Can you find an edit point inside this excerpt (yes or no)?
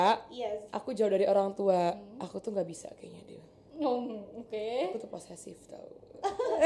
no